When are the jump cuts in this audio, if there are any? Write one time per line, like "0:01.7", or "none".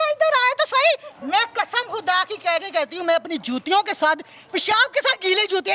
none